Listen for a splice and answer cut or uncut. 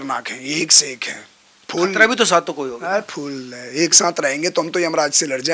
uncut